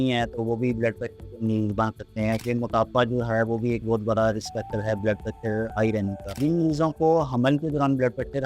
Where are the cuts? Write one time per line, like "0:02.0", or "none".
0:02.4